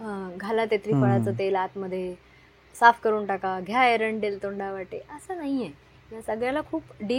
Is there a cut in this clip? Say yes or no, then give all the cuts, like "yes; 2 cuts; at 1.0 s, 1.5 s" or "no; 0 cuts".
no; 0 cuts